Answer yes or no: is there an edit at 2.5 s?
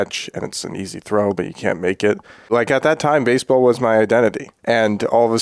yes